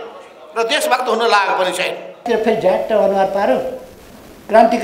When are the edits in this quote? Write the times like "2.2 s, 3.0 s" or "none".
2.2 s